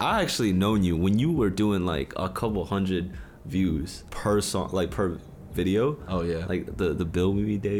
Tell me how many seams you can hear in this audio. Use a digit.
0